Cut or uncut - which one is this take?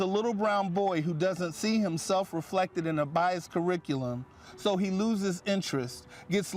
uncut